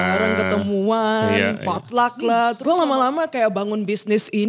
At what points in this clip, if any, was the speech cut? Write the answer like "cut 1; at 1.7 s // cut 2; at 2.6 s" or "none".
cut 1; at 2.6 s